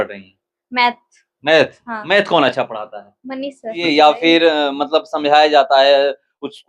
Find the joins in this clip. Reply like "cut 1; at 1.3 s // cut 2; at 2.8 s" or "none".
cut 1; at 3.8 s